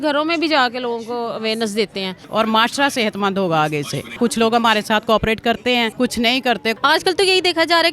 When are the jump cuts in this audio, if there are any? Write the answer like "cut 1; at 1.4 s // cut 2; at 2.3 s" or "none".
cut 1; at 2.2 s // cut 2; at 4.2 s // cut 3; at 5.9 s // cut 4; at 6.7 s